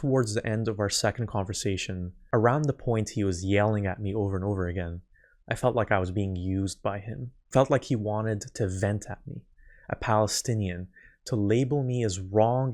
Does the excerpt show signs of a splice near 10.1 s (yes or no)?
no